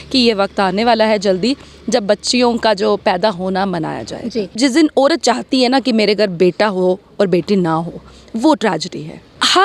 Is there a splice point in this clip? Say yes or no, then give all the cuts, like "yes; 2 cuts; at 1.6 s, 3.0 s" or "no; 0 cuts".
yes; 1 cut; at 4.6 s